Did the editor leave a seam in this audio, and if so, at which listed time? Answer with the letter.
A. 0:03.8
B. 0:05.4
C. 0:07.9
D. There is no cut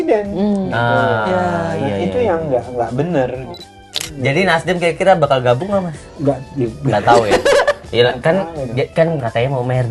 A